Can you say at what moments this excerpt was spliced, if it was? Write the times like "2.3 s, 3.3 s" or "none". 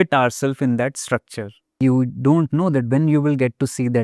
1.8 s